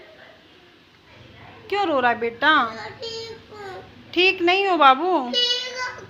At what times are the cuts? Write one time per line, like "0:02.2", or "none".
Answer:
none